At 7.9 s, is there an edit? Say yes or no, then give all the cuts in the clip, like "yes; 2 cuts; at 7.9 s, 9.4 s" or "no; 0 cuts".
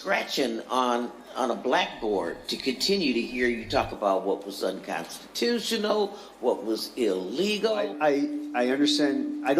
yes; 1 cut; at 7.9 s